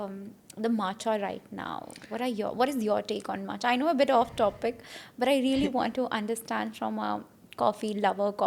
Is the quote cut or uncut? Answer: uncut